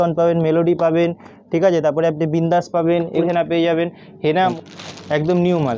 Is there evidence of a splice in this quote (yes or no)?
yes